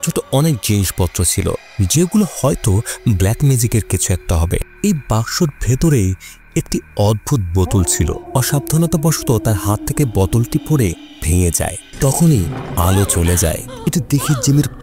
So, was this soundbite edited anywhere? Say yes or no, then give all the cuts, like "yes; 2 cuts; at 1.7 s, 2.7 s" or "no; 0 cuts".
yes; 1 cut; at 8.2 s